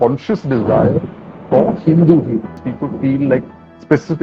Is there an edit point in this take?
yes; 1 cut; at 2.7 s

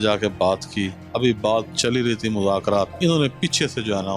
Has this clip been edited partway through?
yes; 2 cuts; at 1.0 s, 2.9 s

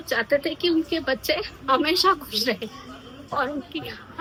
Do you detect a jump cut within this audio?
no; 0 cuts

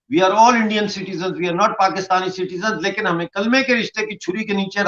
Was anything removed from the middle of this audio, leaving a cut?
no; 0 cuts

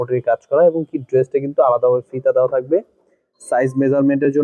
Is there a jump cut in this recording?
no; 0 cuts

